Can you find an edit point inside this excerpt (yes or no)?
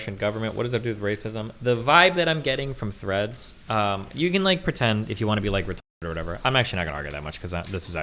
no